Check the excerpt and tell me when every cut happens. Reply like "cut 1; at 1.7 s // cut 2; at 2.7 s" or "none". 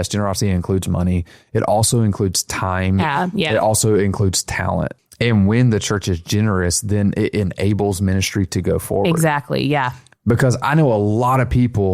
cut 1; at 5.0 s